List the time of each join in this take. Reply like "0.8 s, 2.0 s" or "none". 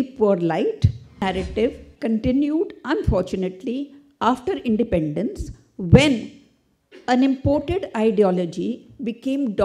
1.2 s